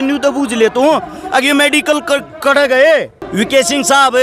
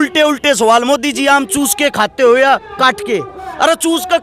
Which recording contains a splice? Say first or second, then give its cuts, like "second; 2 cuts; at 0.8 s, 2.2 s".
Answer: first; 1 cut; at 3.2 s